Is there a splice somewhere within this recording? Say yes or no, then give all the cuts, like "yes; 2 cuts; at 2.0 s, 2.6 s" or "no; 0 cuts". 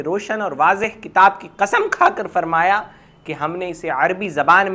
no; 0 cuts